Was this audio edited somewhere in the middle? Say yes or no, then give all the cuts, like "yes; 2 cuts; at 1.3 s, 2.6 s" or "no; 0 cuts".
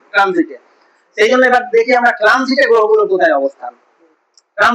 no; 0 cuts